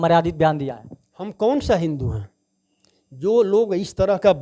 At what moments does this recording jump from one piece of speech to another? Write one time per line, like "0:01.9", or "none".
none